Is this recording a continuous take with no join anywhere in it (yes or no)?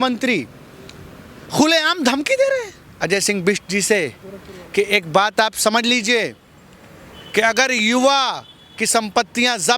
no